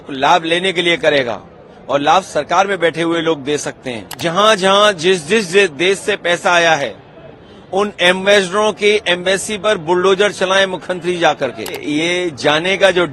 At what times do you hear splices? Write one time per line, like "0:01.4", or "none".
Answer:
0:04.2
0:11.8